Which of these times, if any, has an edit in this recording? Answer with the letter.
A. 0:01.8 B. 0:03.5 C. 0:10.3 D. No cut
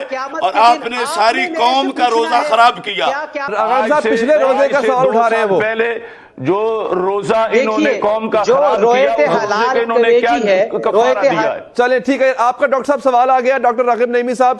B